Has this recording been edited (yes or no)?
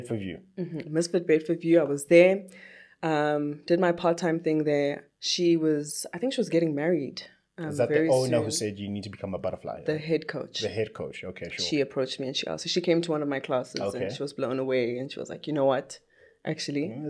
no